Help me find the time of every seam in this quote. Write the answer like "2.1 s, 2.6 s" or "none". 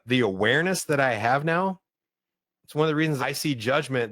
3.2 s